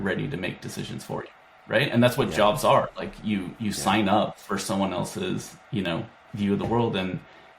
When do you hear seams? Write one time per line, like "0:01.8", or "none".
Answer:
none